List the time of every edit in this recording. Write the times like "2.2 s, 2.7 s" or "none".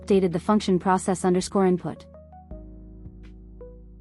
2.0 s